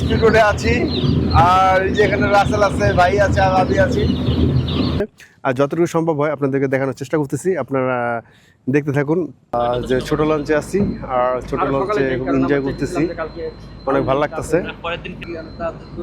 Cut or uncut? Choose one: cut